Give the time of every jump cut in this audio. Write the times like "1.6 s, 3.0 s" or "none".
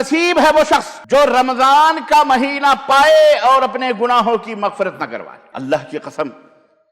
0.9 s, 5.4 s